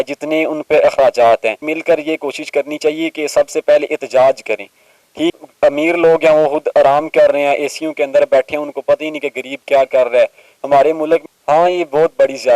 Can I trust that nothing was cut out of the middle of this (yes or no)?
no